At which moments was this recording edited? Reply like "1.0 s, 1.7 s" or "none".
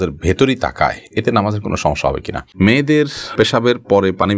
2.5 s